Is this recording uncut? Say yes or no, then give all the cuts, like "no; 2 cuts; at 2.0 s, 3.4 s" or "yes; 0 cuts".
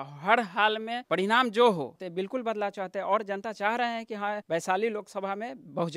no; 3 cuts; at 1.0 s, 2.0 s, 4.4 s